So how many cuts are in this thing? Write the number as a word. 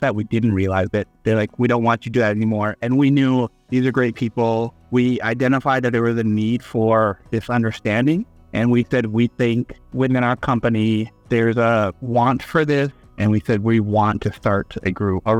zero